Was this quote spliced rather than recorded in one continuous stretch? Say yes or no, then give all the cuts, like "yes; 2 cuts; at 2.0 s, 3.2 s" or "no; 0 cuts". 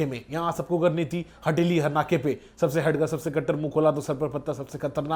no; 0 cuts